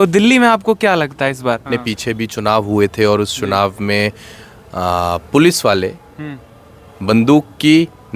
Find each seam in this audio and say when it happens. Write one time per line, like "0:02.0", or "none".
0:01.7